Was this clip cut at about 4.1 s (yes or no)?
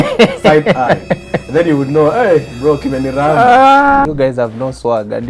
yes